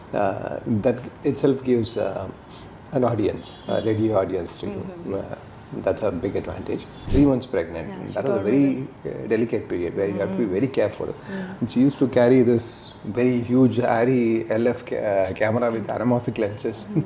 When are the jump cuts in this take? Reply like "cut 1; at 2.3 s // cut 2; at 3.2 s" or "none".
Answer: cut 1; at 6.9 s

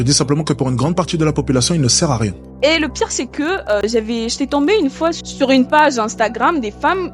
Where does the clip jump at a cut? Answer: cut 1; at 2.4 s // cut 2; at 5.2 s

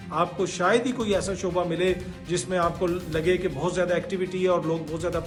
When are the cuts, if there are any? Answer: none

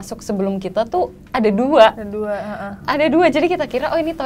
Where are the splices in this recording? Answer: none

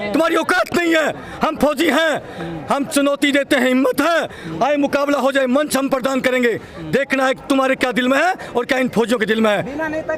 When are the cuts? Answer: none

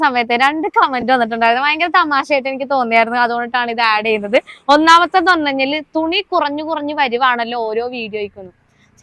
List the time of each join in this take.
none

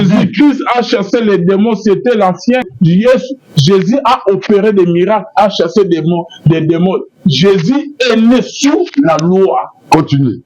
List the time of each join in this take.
cut 1; at 2.7 s

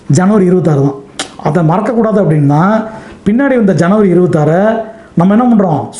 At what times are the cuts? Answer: none

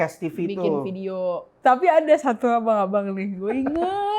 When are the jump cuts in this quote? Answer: cut 1; at 1.5 s

